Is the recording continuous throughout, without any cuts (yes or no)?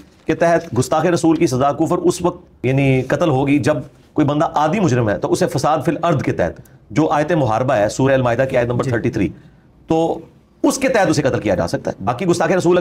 no